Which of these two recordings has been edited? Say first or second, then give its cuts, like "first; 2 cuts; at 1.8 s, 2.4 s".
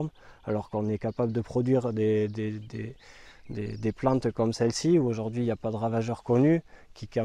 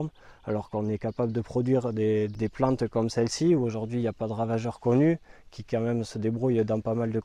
second; 1 cut; at 2.3 s